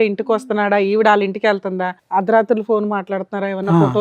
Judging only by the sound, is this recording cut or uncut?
cut